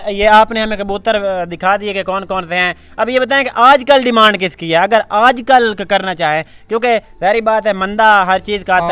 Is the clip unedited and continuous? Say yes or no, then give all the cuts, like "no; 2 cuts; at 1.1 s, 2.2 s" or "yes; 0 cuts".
yes; 0 cuts